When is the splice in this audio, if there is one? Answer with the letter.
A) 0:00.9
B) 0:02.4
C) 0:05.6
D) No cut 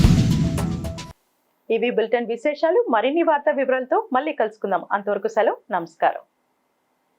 D